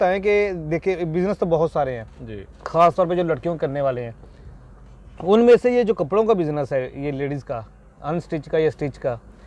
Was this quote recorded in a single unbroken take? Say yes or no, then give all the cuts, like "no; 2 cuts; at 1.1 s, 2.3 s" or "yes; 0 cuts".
yes; 0 cuts